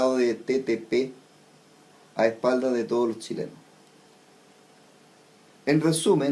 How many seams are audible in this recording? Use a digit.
1